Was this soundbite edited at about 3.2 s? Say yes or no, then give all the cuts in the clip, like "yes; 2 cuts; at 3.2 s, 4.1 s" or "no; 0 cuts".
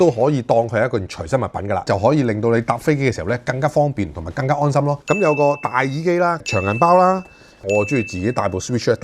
no; 3 cuts; at 1.8 s, 5.0 s, 7.7 s